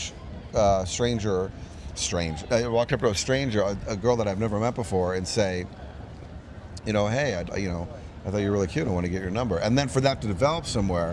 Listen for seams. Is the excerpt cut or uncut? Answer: uncut